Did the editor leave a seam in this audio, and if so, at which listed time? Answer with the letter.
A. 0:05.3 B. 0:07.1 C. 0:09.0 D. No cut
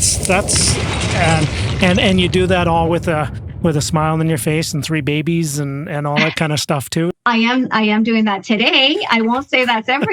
B